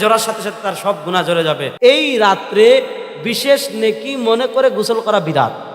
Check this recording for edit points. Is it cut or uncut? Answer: cut